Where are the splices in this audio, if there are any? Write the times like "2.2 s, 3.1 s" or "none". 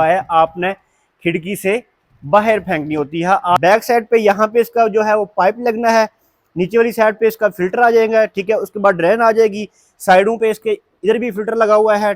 3.6 s